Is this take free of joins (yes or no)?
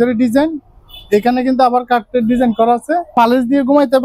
no